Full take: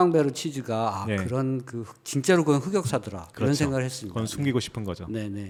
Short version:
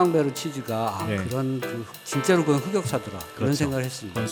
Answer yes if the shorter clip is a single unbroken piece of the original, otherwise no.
yes